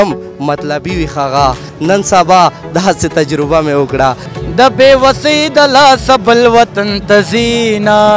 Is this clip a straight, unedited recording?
no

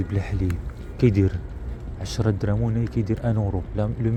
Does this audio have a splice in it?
no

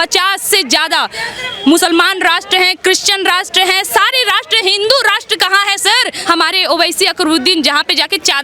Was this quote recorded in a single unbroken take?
no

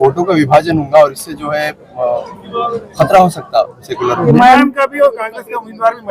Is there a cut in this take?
yes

